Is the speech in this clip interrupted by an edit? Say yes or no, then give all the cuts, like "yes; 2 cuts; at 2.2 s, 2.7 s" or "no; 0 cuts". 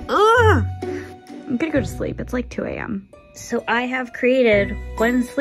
no; 0 cuts